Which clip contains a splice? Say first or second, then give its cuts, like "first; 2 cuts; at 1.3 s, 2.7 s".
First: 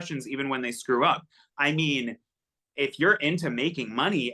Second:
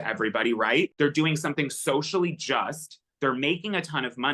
second; 1 cut; at 0.9 s